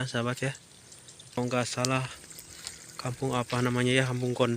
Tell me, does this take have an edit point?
yes; 1 cut; at 1.4 s

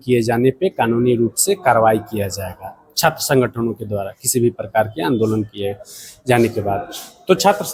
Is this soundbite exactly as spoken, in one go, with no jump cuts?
yes; 0 cuts

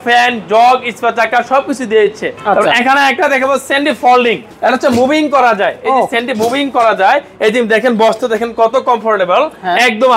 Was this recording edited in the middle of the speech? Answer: yes; 2 cuts; at 2.3 s, 4.5 s

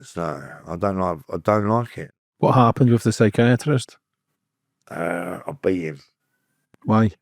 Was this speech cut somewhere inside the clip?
yes; 1 cut; at 2.0 s

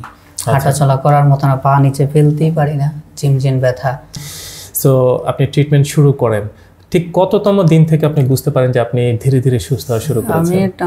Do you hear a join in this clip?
yes; 1 cut; at 4.1 s

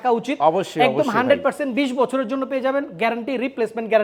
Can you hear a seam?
no; 0 cuts

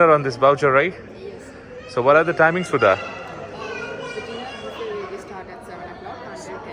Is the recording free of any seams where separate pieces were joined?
yes; 0 cuts

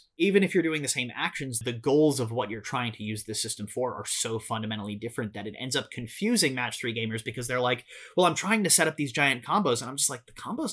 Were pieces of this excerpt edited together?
yes; 1 cut; at 1.7 s

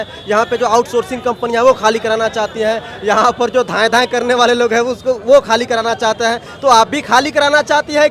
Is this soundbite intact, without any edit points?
yes; 0 cuts

